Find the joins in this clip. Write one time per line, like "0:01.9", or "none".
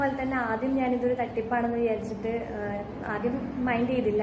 none